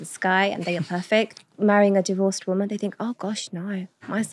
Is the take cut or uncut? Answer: cut